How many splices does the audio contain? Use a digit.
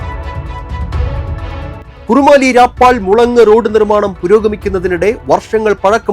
1